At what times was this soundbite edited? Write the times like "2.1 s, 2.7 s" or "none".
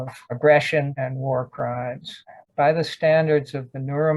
2.4 s